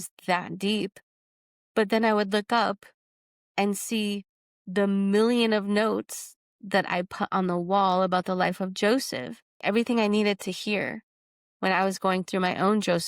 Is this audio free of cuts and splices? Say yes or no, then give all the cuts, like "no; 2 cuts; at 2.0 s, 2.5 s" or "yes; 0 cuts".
no; 1 cut; at 9.6 s